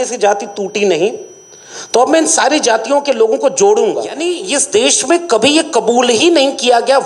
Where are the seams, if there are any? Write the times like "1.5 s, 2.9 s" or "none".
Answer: 4.3 s